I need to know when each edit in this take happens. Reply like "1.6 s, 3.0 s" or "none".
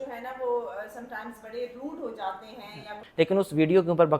3.0 s